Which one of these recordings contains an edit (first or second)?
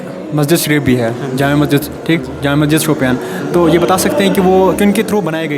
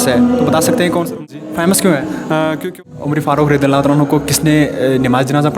second